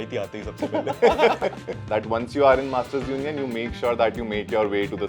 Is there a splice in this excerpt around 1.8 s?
yes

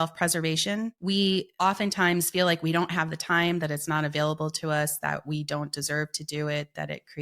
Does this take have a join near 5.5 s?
no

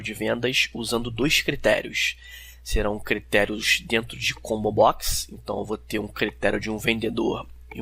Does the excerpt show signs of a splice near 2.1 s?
no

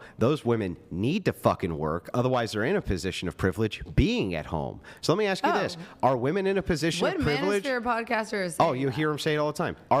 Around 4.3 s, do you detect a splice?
no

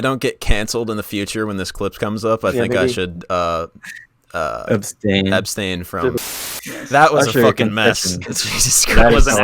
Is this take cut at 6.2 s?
yes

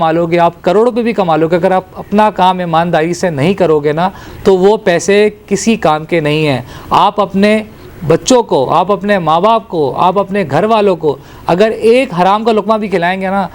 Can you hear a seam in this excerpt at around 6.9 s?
no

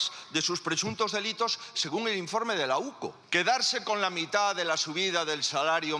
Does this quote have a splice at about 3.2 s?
yes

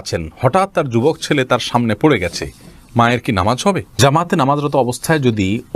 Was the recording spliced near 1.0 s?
no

